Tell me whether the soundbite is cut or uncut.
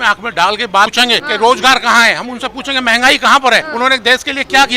cut